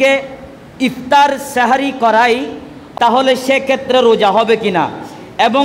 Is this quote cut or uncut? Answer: cut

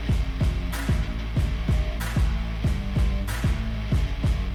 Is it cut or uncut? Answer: uncut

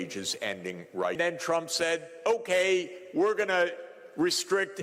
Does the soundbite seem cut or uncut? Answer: cut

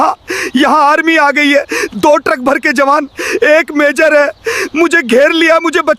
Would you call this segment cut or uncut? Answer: uncut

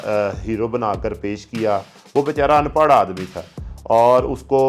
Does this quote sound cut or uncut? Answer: uncut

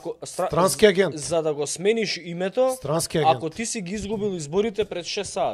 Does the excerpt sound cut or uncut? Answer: uncut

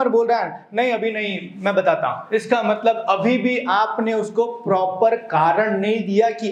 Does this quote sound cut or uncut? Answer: uncut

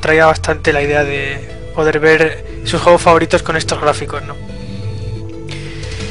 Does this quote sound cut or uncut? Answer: uncut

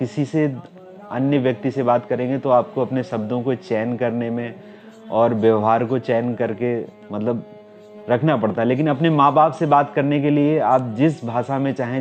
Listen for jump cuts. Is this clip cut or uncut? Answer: uncut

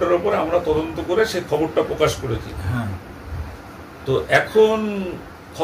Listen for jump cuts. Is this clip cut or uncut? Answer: uncut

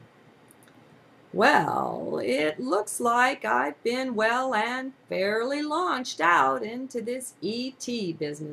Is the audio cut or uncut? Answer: cut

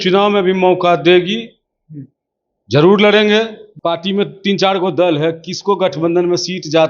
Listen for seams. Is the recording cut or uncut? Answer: cut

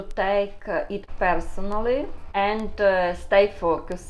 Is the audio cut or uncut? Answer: cut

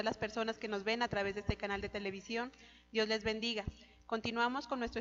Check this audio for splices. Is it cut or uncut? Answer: uncut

